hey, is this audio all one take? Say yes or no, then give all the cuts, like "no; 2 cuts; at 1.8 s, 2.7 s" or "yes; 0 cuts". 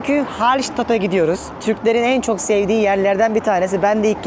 no; 1 cut; at 1.5 s